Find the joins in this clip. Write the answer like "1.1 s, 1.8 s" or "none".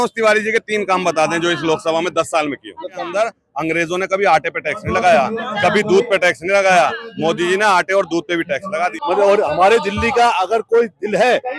3.0 s, 9.0 s